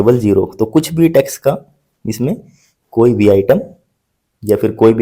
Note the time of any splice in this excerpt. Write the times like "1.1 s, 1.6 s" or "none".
none